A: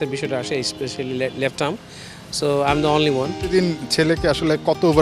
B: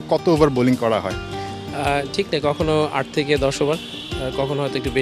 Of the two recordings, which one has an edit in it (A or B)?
A